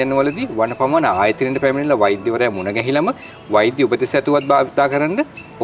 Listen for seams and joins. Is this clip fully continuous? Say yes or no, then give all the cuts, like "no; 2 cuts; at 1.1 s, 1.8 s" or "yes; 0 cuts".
yes; 0 cuts